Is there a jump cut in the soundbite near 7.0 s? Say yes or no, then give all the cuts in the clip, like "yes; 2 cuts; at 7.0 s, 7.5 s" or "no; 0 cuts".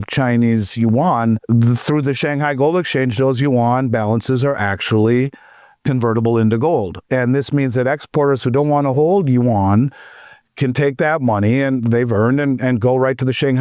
yes; 2 cuts; at 1.4 s, 7.0 s